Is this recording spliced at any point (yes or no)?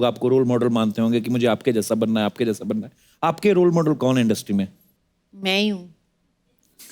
no